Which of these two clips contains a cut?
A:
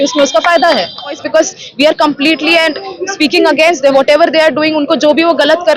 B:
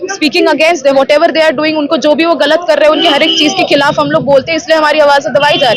A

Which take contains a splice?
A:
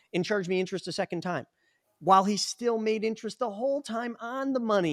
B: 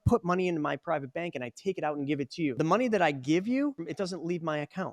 B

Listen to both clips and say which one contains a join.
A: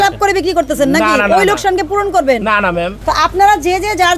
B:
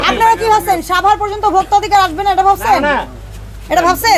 A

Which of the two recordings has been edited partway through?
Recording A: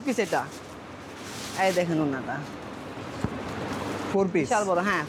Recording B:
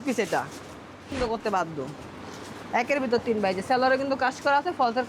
B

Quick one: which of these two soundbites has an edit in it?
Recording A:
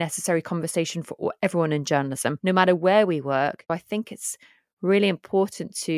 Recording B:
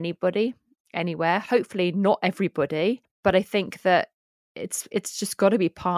A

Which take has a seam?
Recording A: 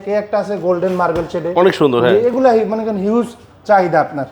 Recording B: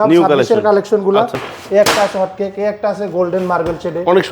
B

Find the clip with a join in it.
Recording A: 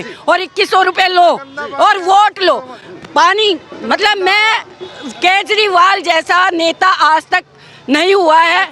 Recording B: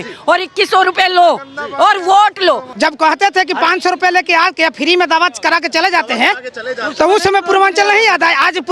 B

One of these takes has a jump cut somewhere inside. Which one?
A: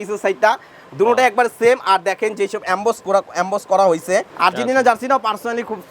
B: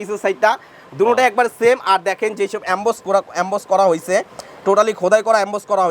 A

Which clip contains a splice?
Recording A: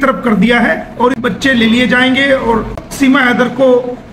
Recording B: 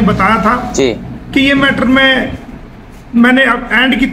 A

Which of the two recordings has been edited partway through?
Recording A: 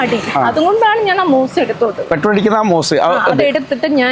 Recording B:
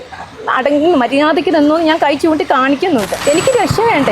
B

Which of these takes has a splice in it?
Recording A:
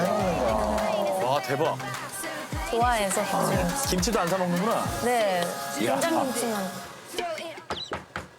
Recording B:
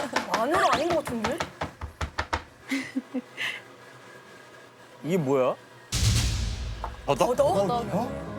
A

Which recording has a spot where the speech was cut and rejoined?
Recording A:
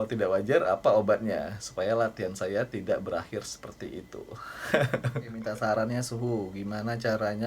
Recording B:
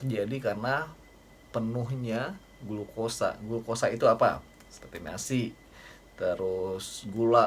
A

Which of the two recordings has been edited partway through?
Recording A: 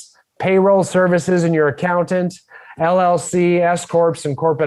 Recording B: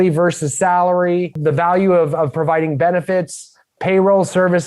B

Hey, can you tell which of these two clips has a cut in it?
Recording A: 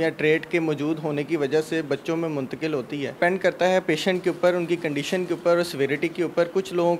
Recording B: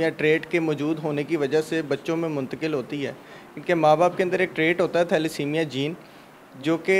A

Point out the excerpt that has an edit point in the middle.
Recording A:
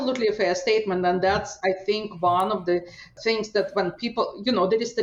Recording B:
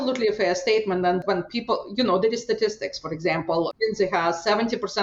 B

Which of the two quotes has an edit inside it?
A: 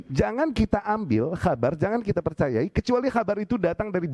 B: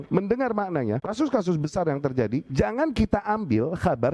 B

